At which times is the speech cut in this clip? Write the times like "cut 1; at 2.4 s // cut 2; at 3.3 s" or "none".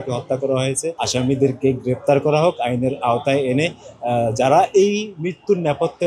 cut 1; at 0.9 s